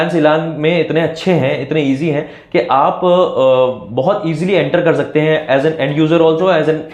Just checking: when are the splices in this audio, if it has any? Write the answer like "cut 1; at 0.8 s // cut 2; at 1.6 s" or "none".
none